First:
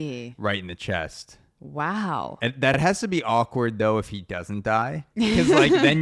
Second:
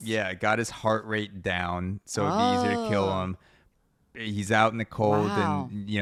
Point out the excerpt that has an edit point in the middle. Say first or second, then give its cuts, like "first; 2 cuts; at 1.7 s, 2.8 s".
first; 2 cuts; at 2.7 s, 5.0 s